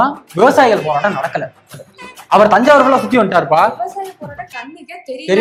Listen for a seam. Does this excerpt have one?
no; 0 cuts

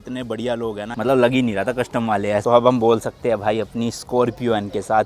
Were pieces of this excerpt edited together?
yes; 2 cuts; at 0.9 s, 2.4 s

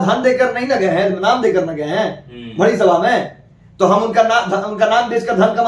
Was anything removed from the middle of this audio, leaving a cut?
no; 0 cuts

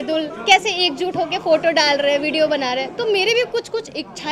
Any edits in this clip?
no; 0 cuts

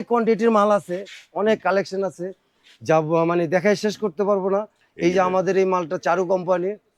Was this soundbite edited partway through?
no; 0 cuts

